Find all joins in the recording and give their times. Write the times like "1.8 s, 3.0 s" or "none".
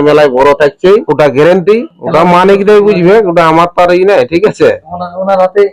1.1 s, 2.0 s